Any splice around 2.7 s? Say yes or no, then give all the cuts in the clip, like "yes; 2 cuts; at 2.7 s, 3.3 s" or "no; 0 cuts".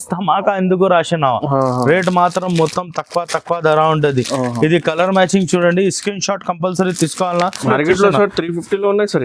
no; 1 cut; at 7.6 s